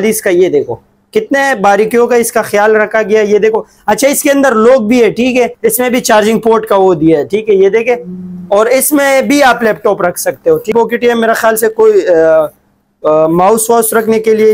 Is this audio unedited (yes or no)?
no